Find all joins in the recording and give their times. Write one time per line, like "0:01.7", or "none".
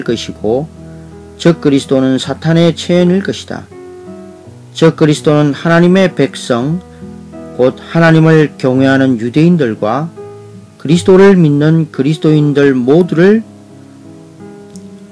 none